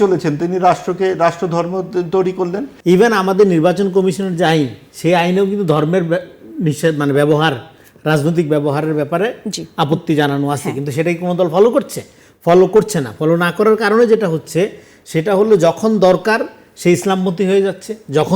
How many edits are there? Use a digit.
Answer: 1